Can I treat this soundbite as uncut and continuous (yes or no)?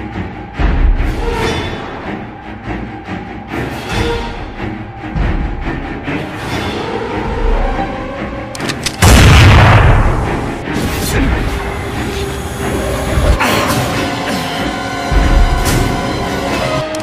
no